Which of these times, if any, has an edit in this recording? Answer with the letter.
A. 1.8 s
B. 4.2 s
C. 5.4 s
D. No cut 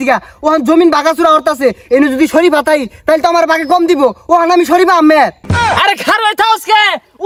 D